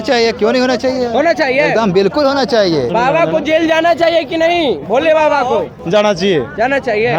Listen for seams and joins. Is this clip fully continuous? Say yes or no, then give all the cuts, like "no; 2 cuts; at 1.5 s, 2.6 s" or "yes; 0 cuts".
no; 2 cuts; at 2.9 s, 5.8 s